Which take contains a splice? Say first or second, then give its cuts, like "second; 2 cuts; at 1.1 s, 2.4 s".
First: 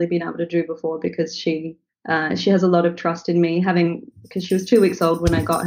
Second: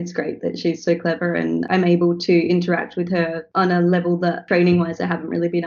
second; 3 cuts; at 1.7 s, 3.4 s, 4.4 s